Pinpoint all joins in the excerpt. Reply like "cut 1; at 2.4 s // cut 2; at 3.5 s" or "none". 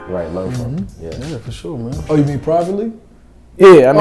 cut 1; at 2.0 s